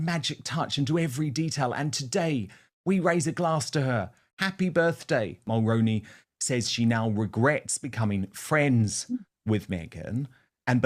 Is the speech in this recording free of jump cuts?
no; 1 cut; at 5.0 s

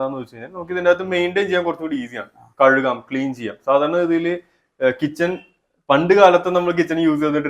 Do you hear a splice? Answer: no; 0 cuts

